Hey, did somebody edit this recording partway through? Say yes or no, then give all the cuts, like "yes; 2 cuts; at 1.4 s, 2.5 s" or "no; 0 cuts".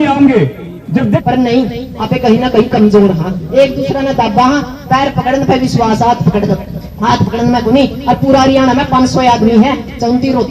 yes; 1 cut; at 1.2 s